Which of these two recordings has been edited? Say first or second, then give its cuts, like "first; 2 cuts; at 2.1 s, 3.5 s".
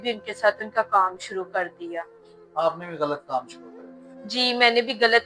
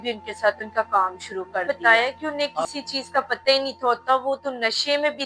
second; 1 cut; at 1.6 s